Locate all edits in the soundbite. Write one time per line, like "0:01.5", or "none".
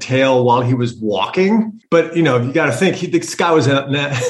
0:01.8